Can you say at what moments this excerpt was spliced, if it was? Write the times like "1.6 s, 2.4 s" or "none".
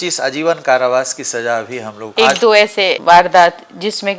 2.1 s